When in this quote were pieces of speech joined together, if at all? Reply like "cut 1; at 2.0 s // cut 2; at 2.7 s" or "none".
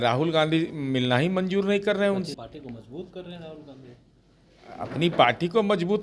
cut 1; at 2.3 s